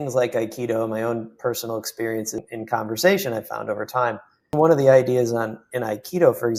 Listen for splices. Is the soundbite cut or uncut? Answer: cut